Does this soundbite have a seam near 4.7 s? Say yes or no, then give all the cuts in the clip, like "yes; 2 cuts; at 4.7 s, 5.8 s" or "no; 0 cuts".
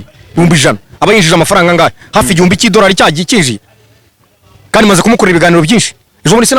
no; 0 cuts